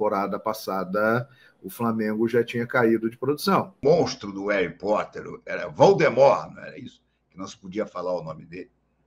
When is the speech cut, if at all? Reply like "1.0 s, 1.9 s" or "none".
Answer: 3.8 s